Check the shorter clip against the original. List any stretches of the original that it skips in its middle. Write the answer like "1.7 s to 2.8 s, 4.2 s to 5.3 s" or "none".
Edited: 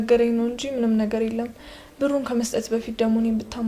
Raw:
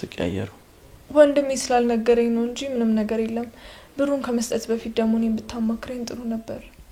none